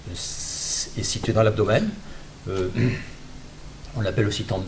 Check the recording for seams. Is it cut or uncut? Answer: cut